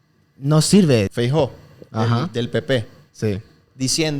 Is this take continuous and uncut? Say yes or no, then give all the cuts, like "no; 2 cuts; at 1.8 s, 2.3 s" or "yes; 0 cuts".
no; 1 cut; at 1.1 s